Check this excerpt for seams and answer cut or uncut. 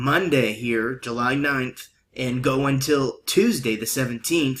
cut